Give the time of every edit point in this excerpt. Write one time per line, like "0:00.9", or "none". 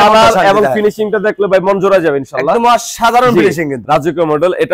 0:03.8